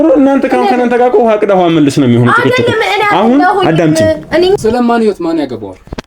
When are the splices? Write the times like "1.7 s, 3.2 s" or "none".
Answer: 4.6 s